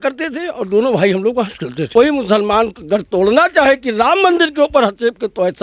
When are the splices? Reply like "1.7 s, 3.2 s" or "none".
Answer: 1.9 s

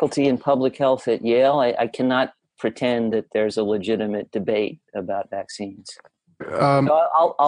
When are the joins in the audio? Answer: 6.5 s

